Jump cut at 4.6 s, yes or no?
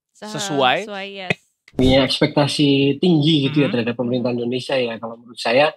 no